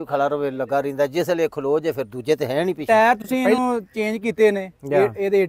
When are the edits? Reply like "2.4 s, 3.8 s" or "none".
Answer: 2.8 s